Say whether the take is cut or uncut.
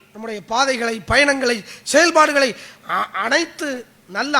uncut